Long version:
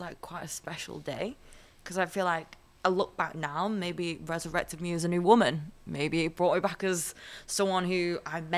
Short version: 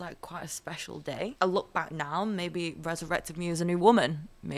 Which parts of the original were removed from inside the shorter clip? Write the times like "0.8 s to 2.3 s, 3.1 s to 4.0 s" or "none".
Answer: 1.3 s to 2.8 s